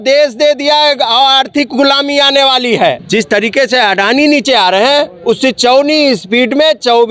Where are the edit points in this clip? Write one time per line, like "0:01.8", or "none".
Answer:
0:03.0